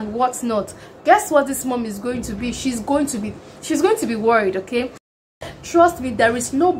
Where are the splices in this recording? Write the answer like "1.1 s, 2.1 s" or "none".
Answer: 5.3 s